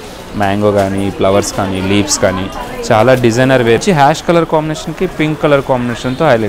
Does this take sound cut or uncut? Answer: cut